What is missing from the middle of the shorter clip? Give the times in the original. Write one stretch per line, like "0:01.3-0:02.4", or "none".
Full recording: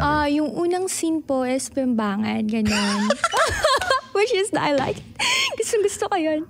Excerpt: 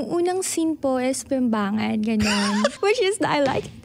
0:03.2-0:04.1